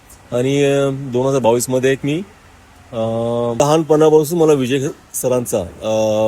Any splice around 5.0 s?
no; 1 cut; at 3.6 s

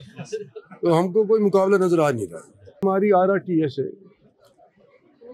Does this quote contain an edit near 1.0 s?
no; 1 cut; at 2.8 s

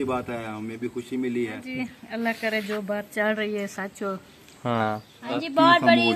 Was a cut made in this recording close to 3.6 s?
no; 2 cuts; at 1.7 s, 5.4 s

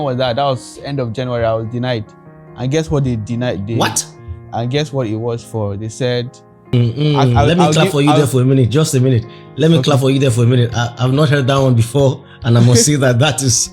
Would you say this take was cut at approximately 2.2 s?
no; 1 cut; at 6.7 s

